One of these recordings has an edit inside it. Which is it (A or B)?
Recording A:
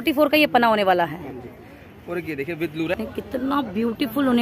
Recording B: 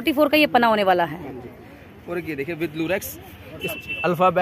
A